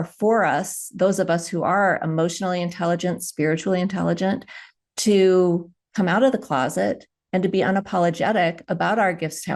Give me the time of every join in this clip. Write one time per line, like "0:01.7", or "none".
none